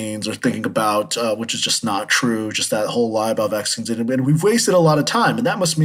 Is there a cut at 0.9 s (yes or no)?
no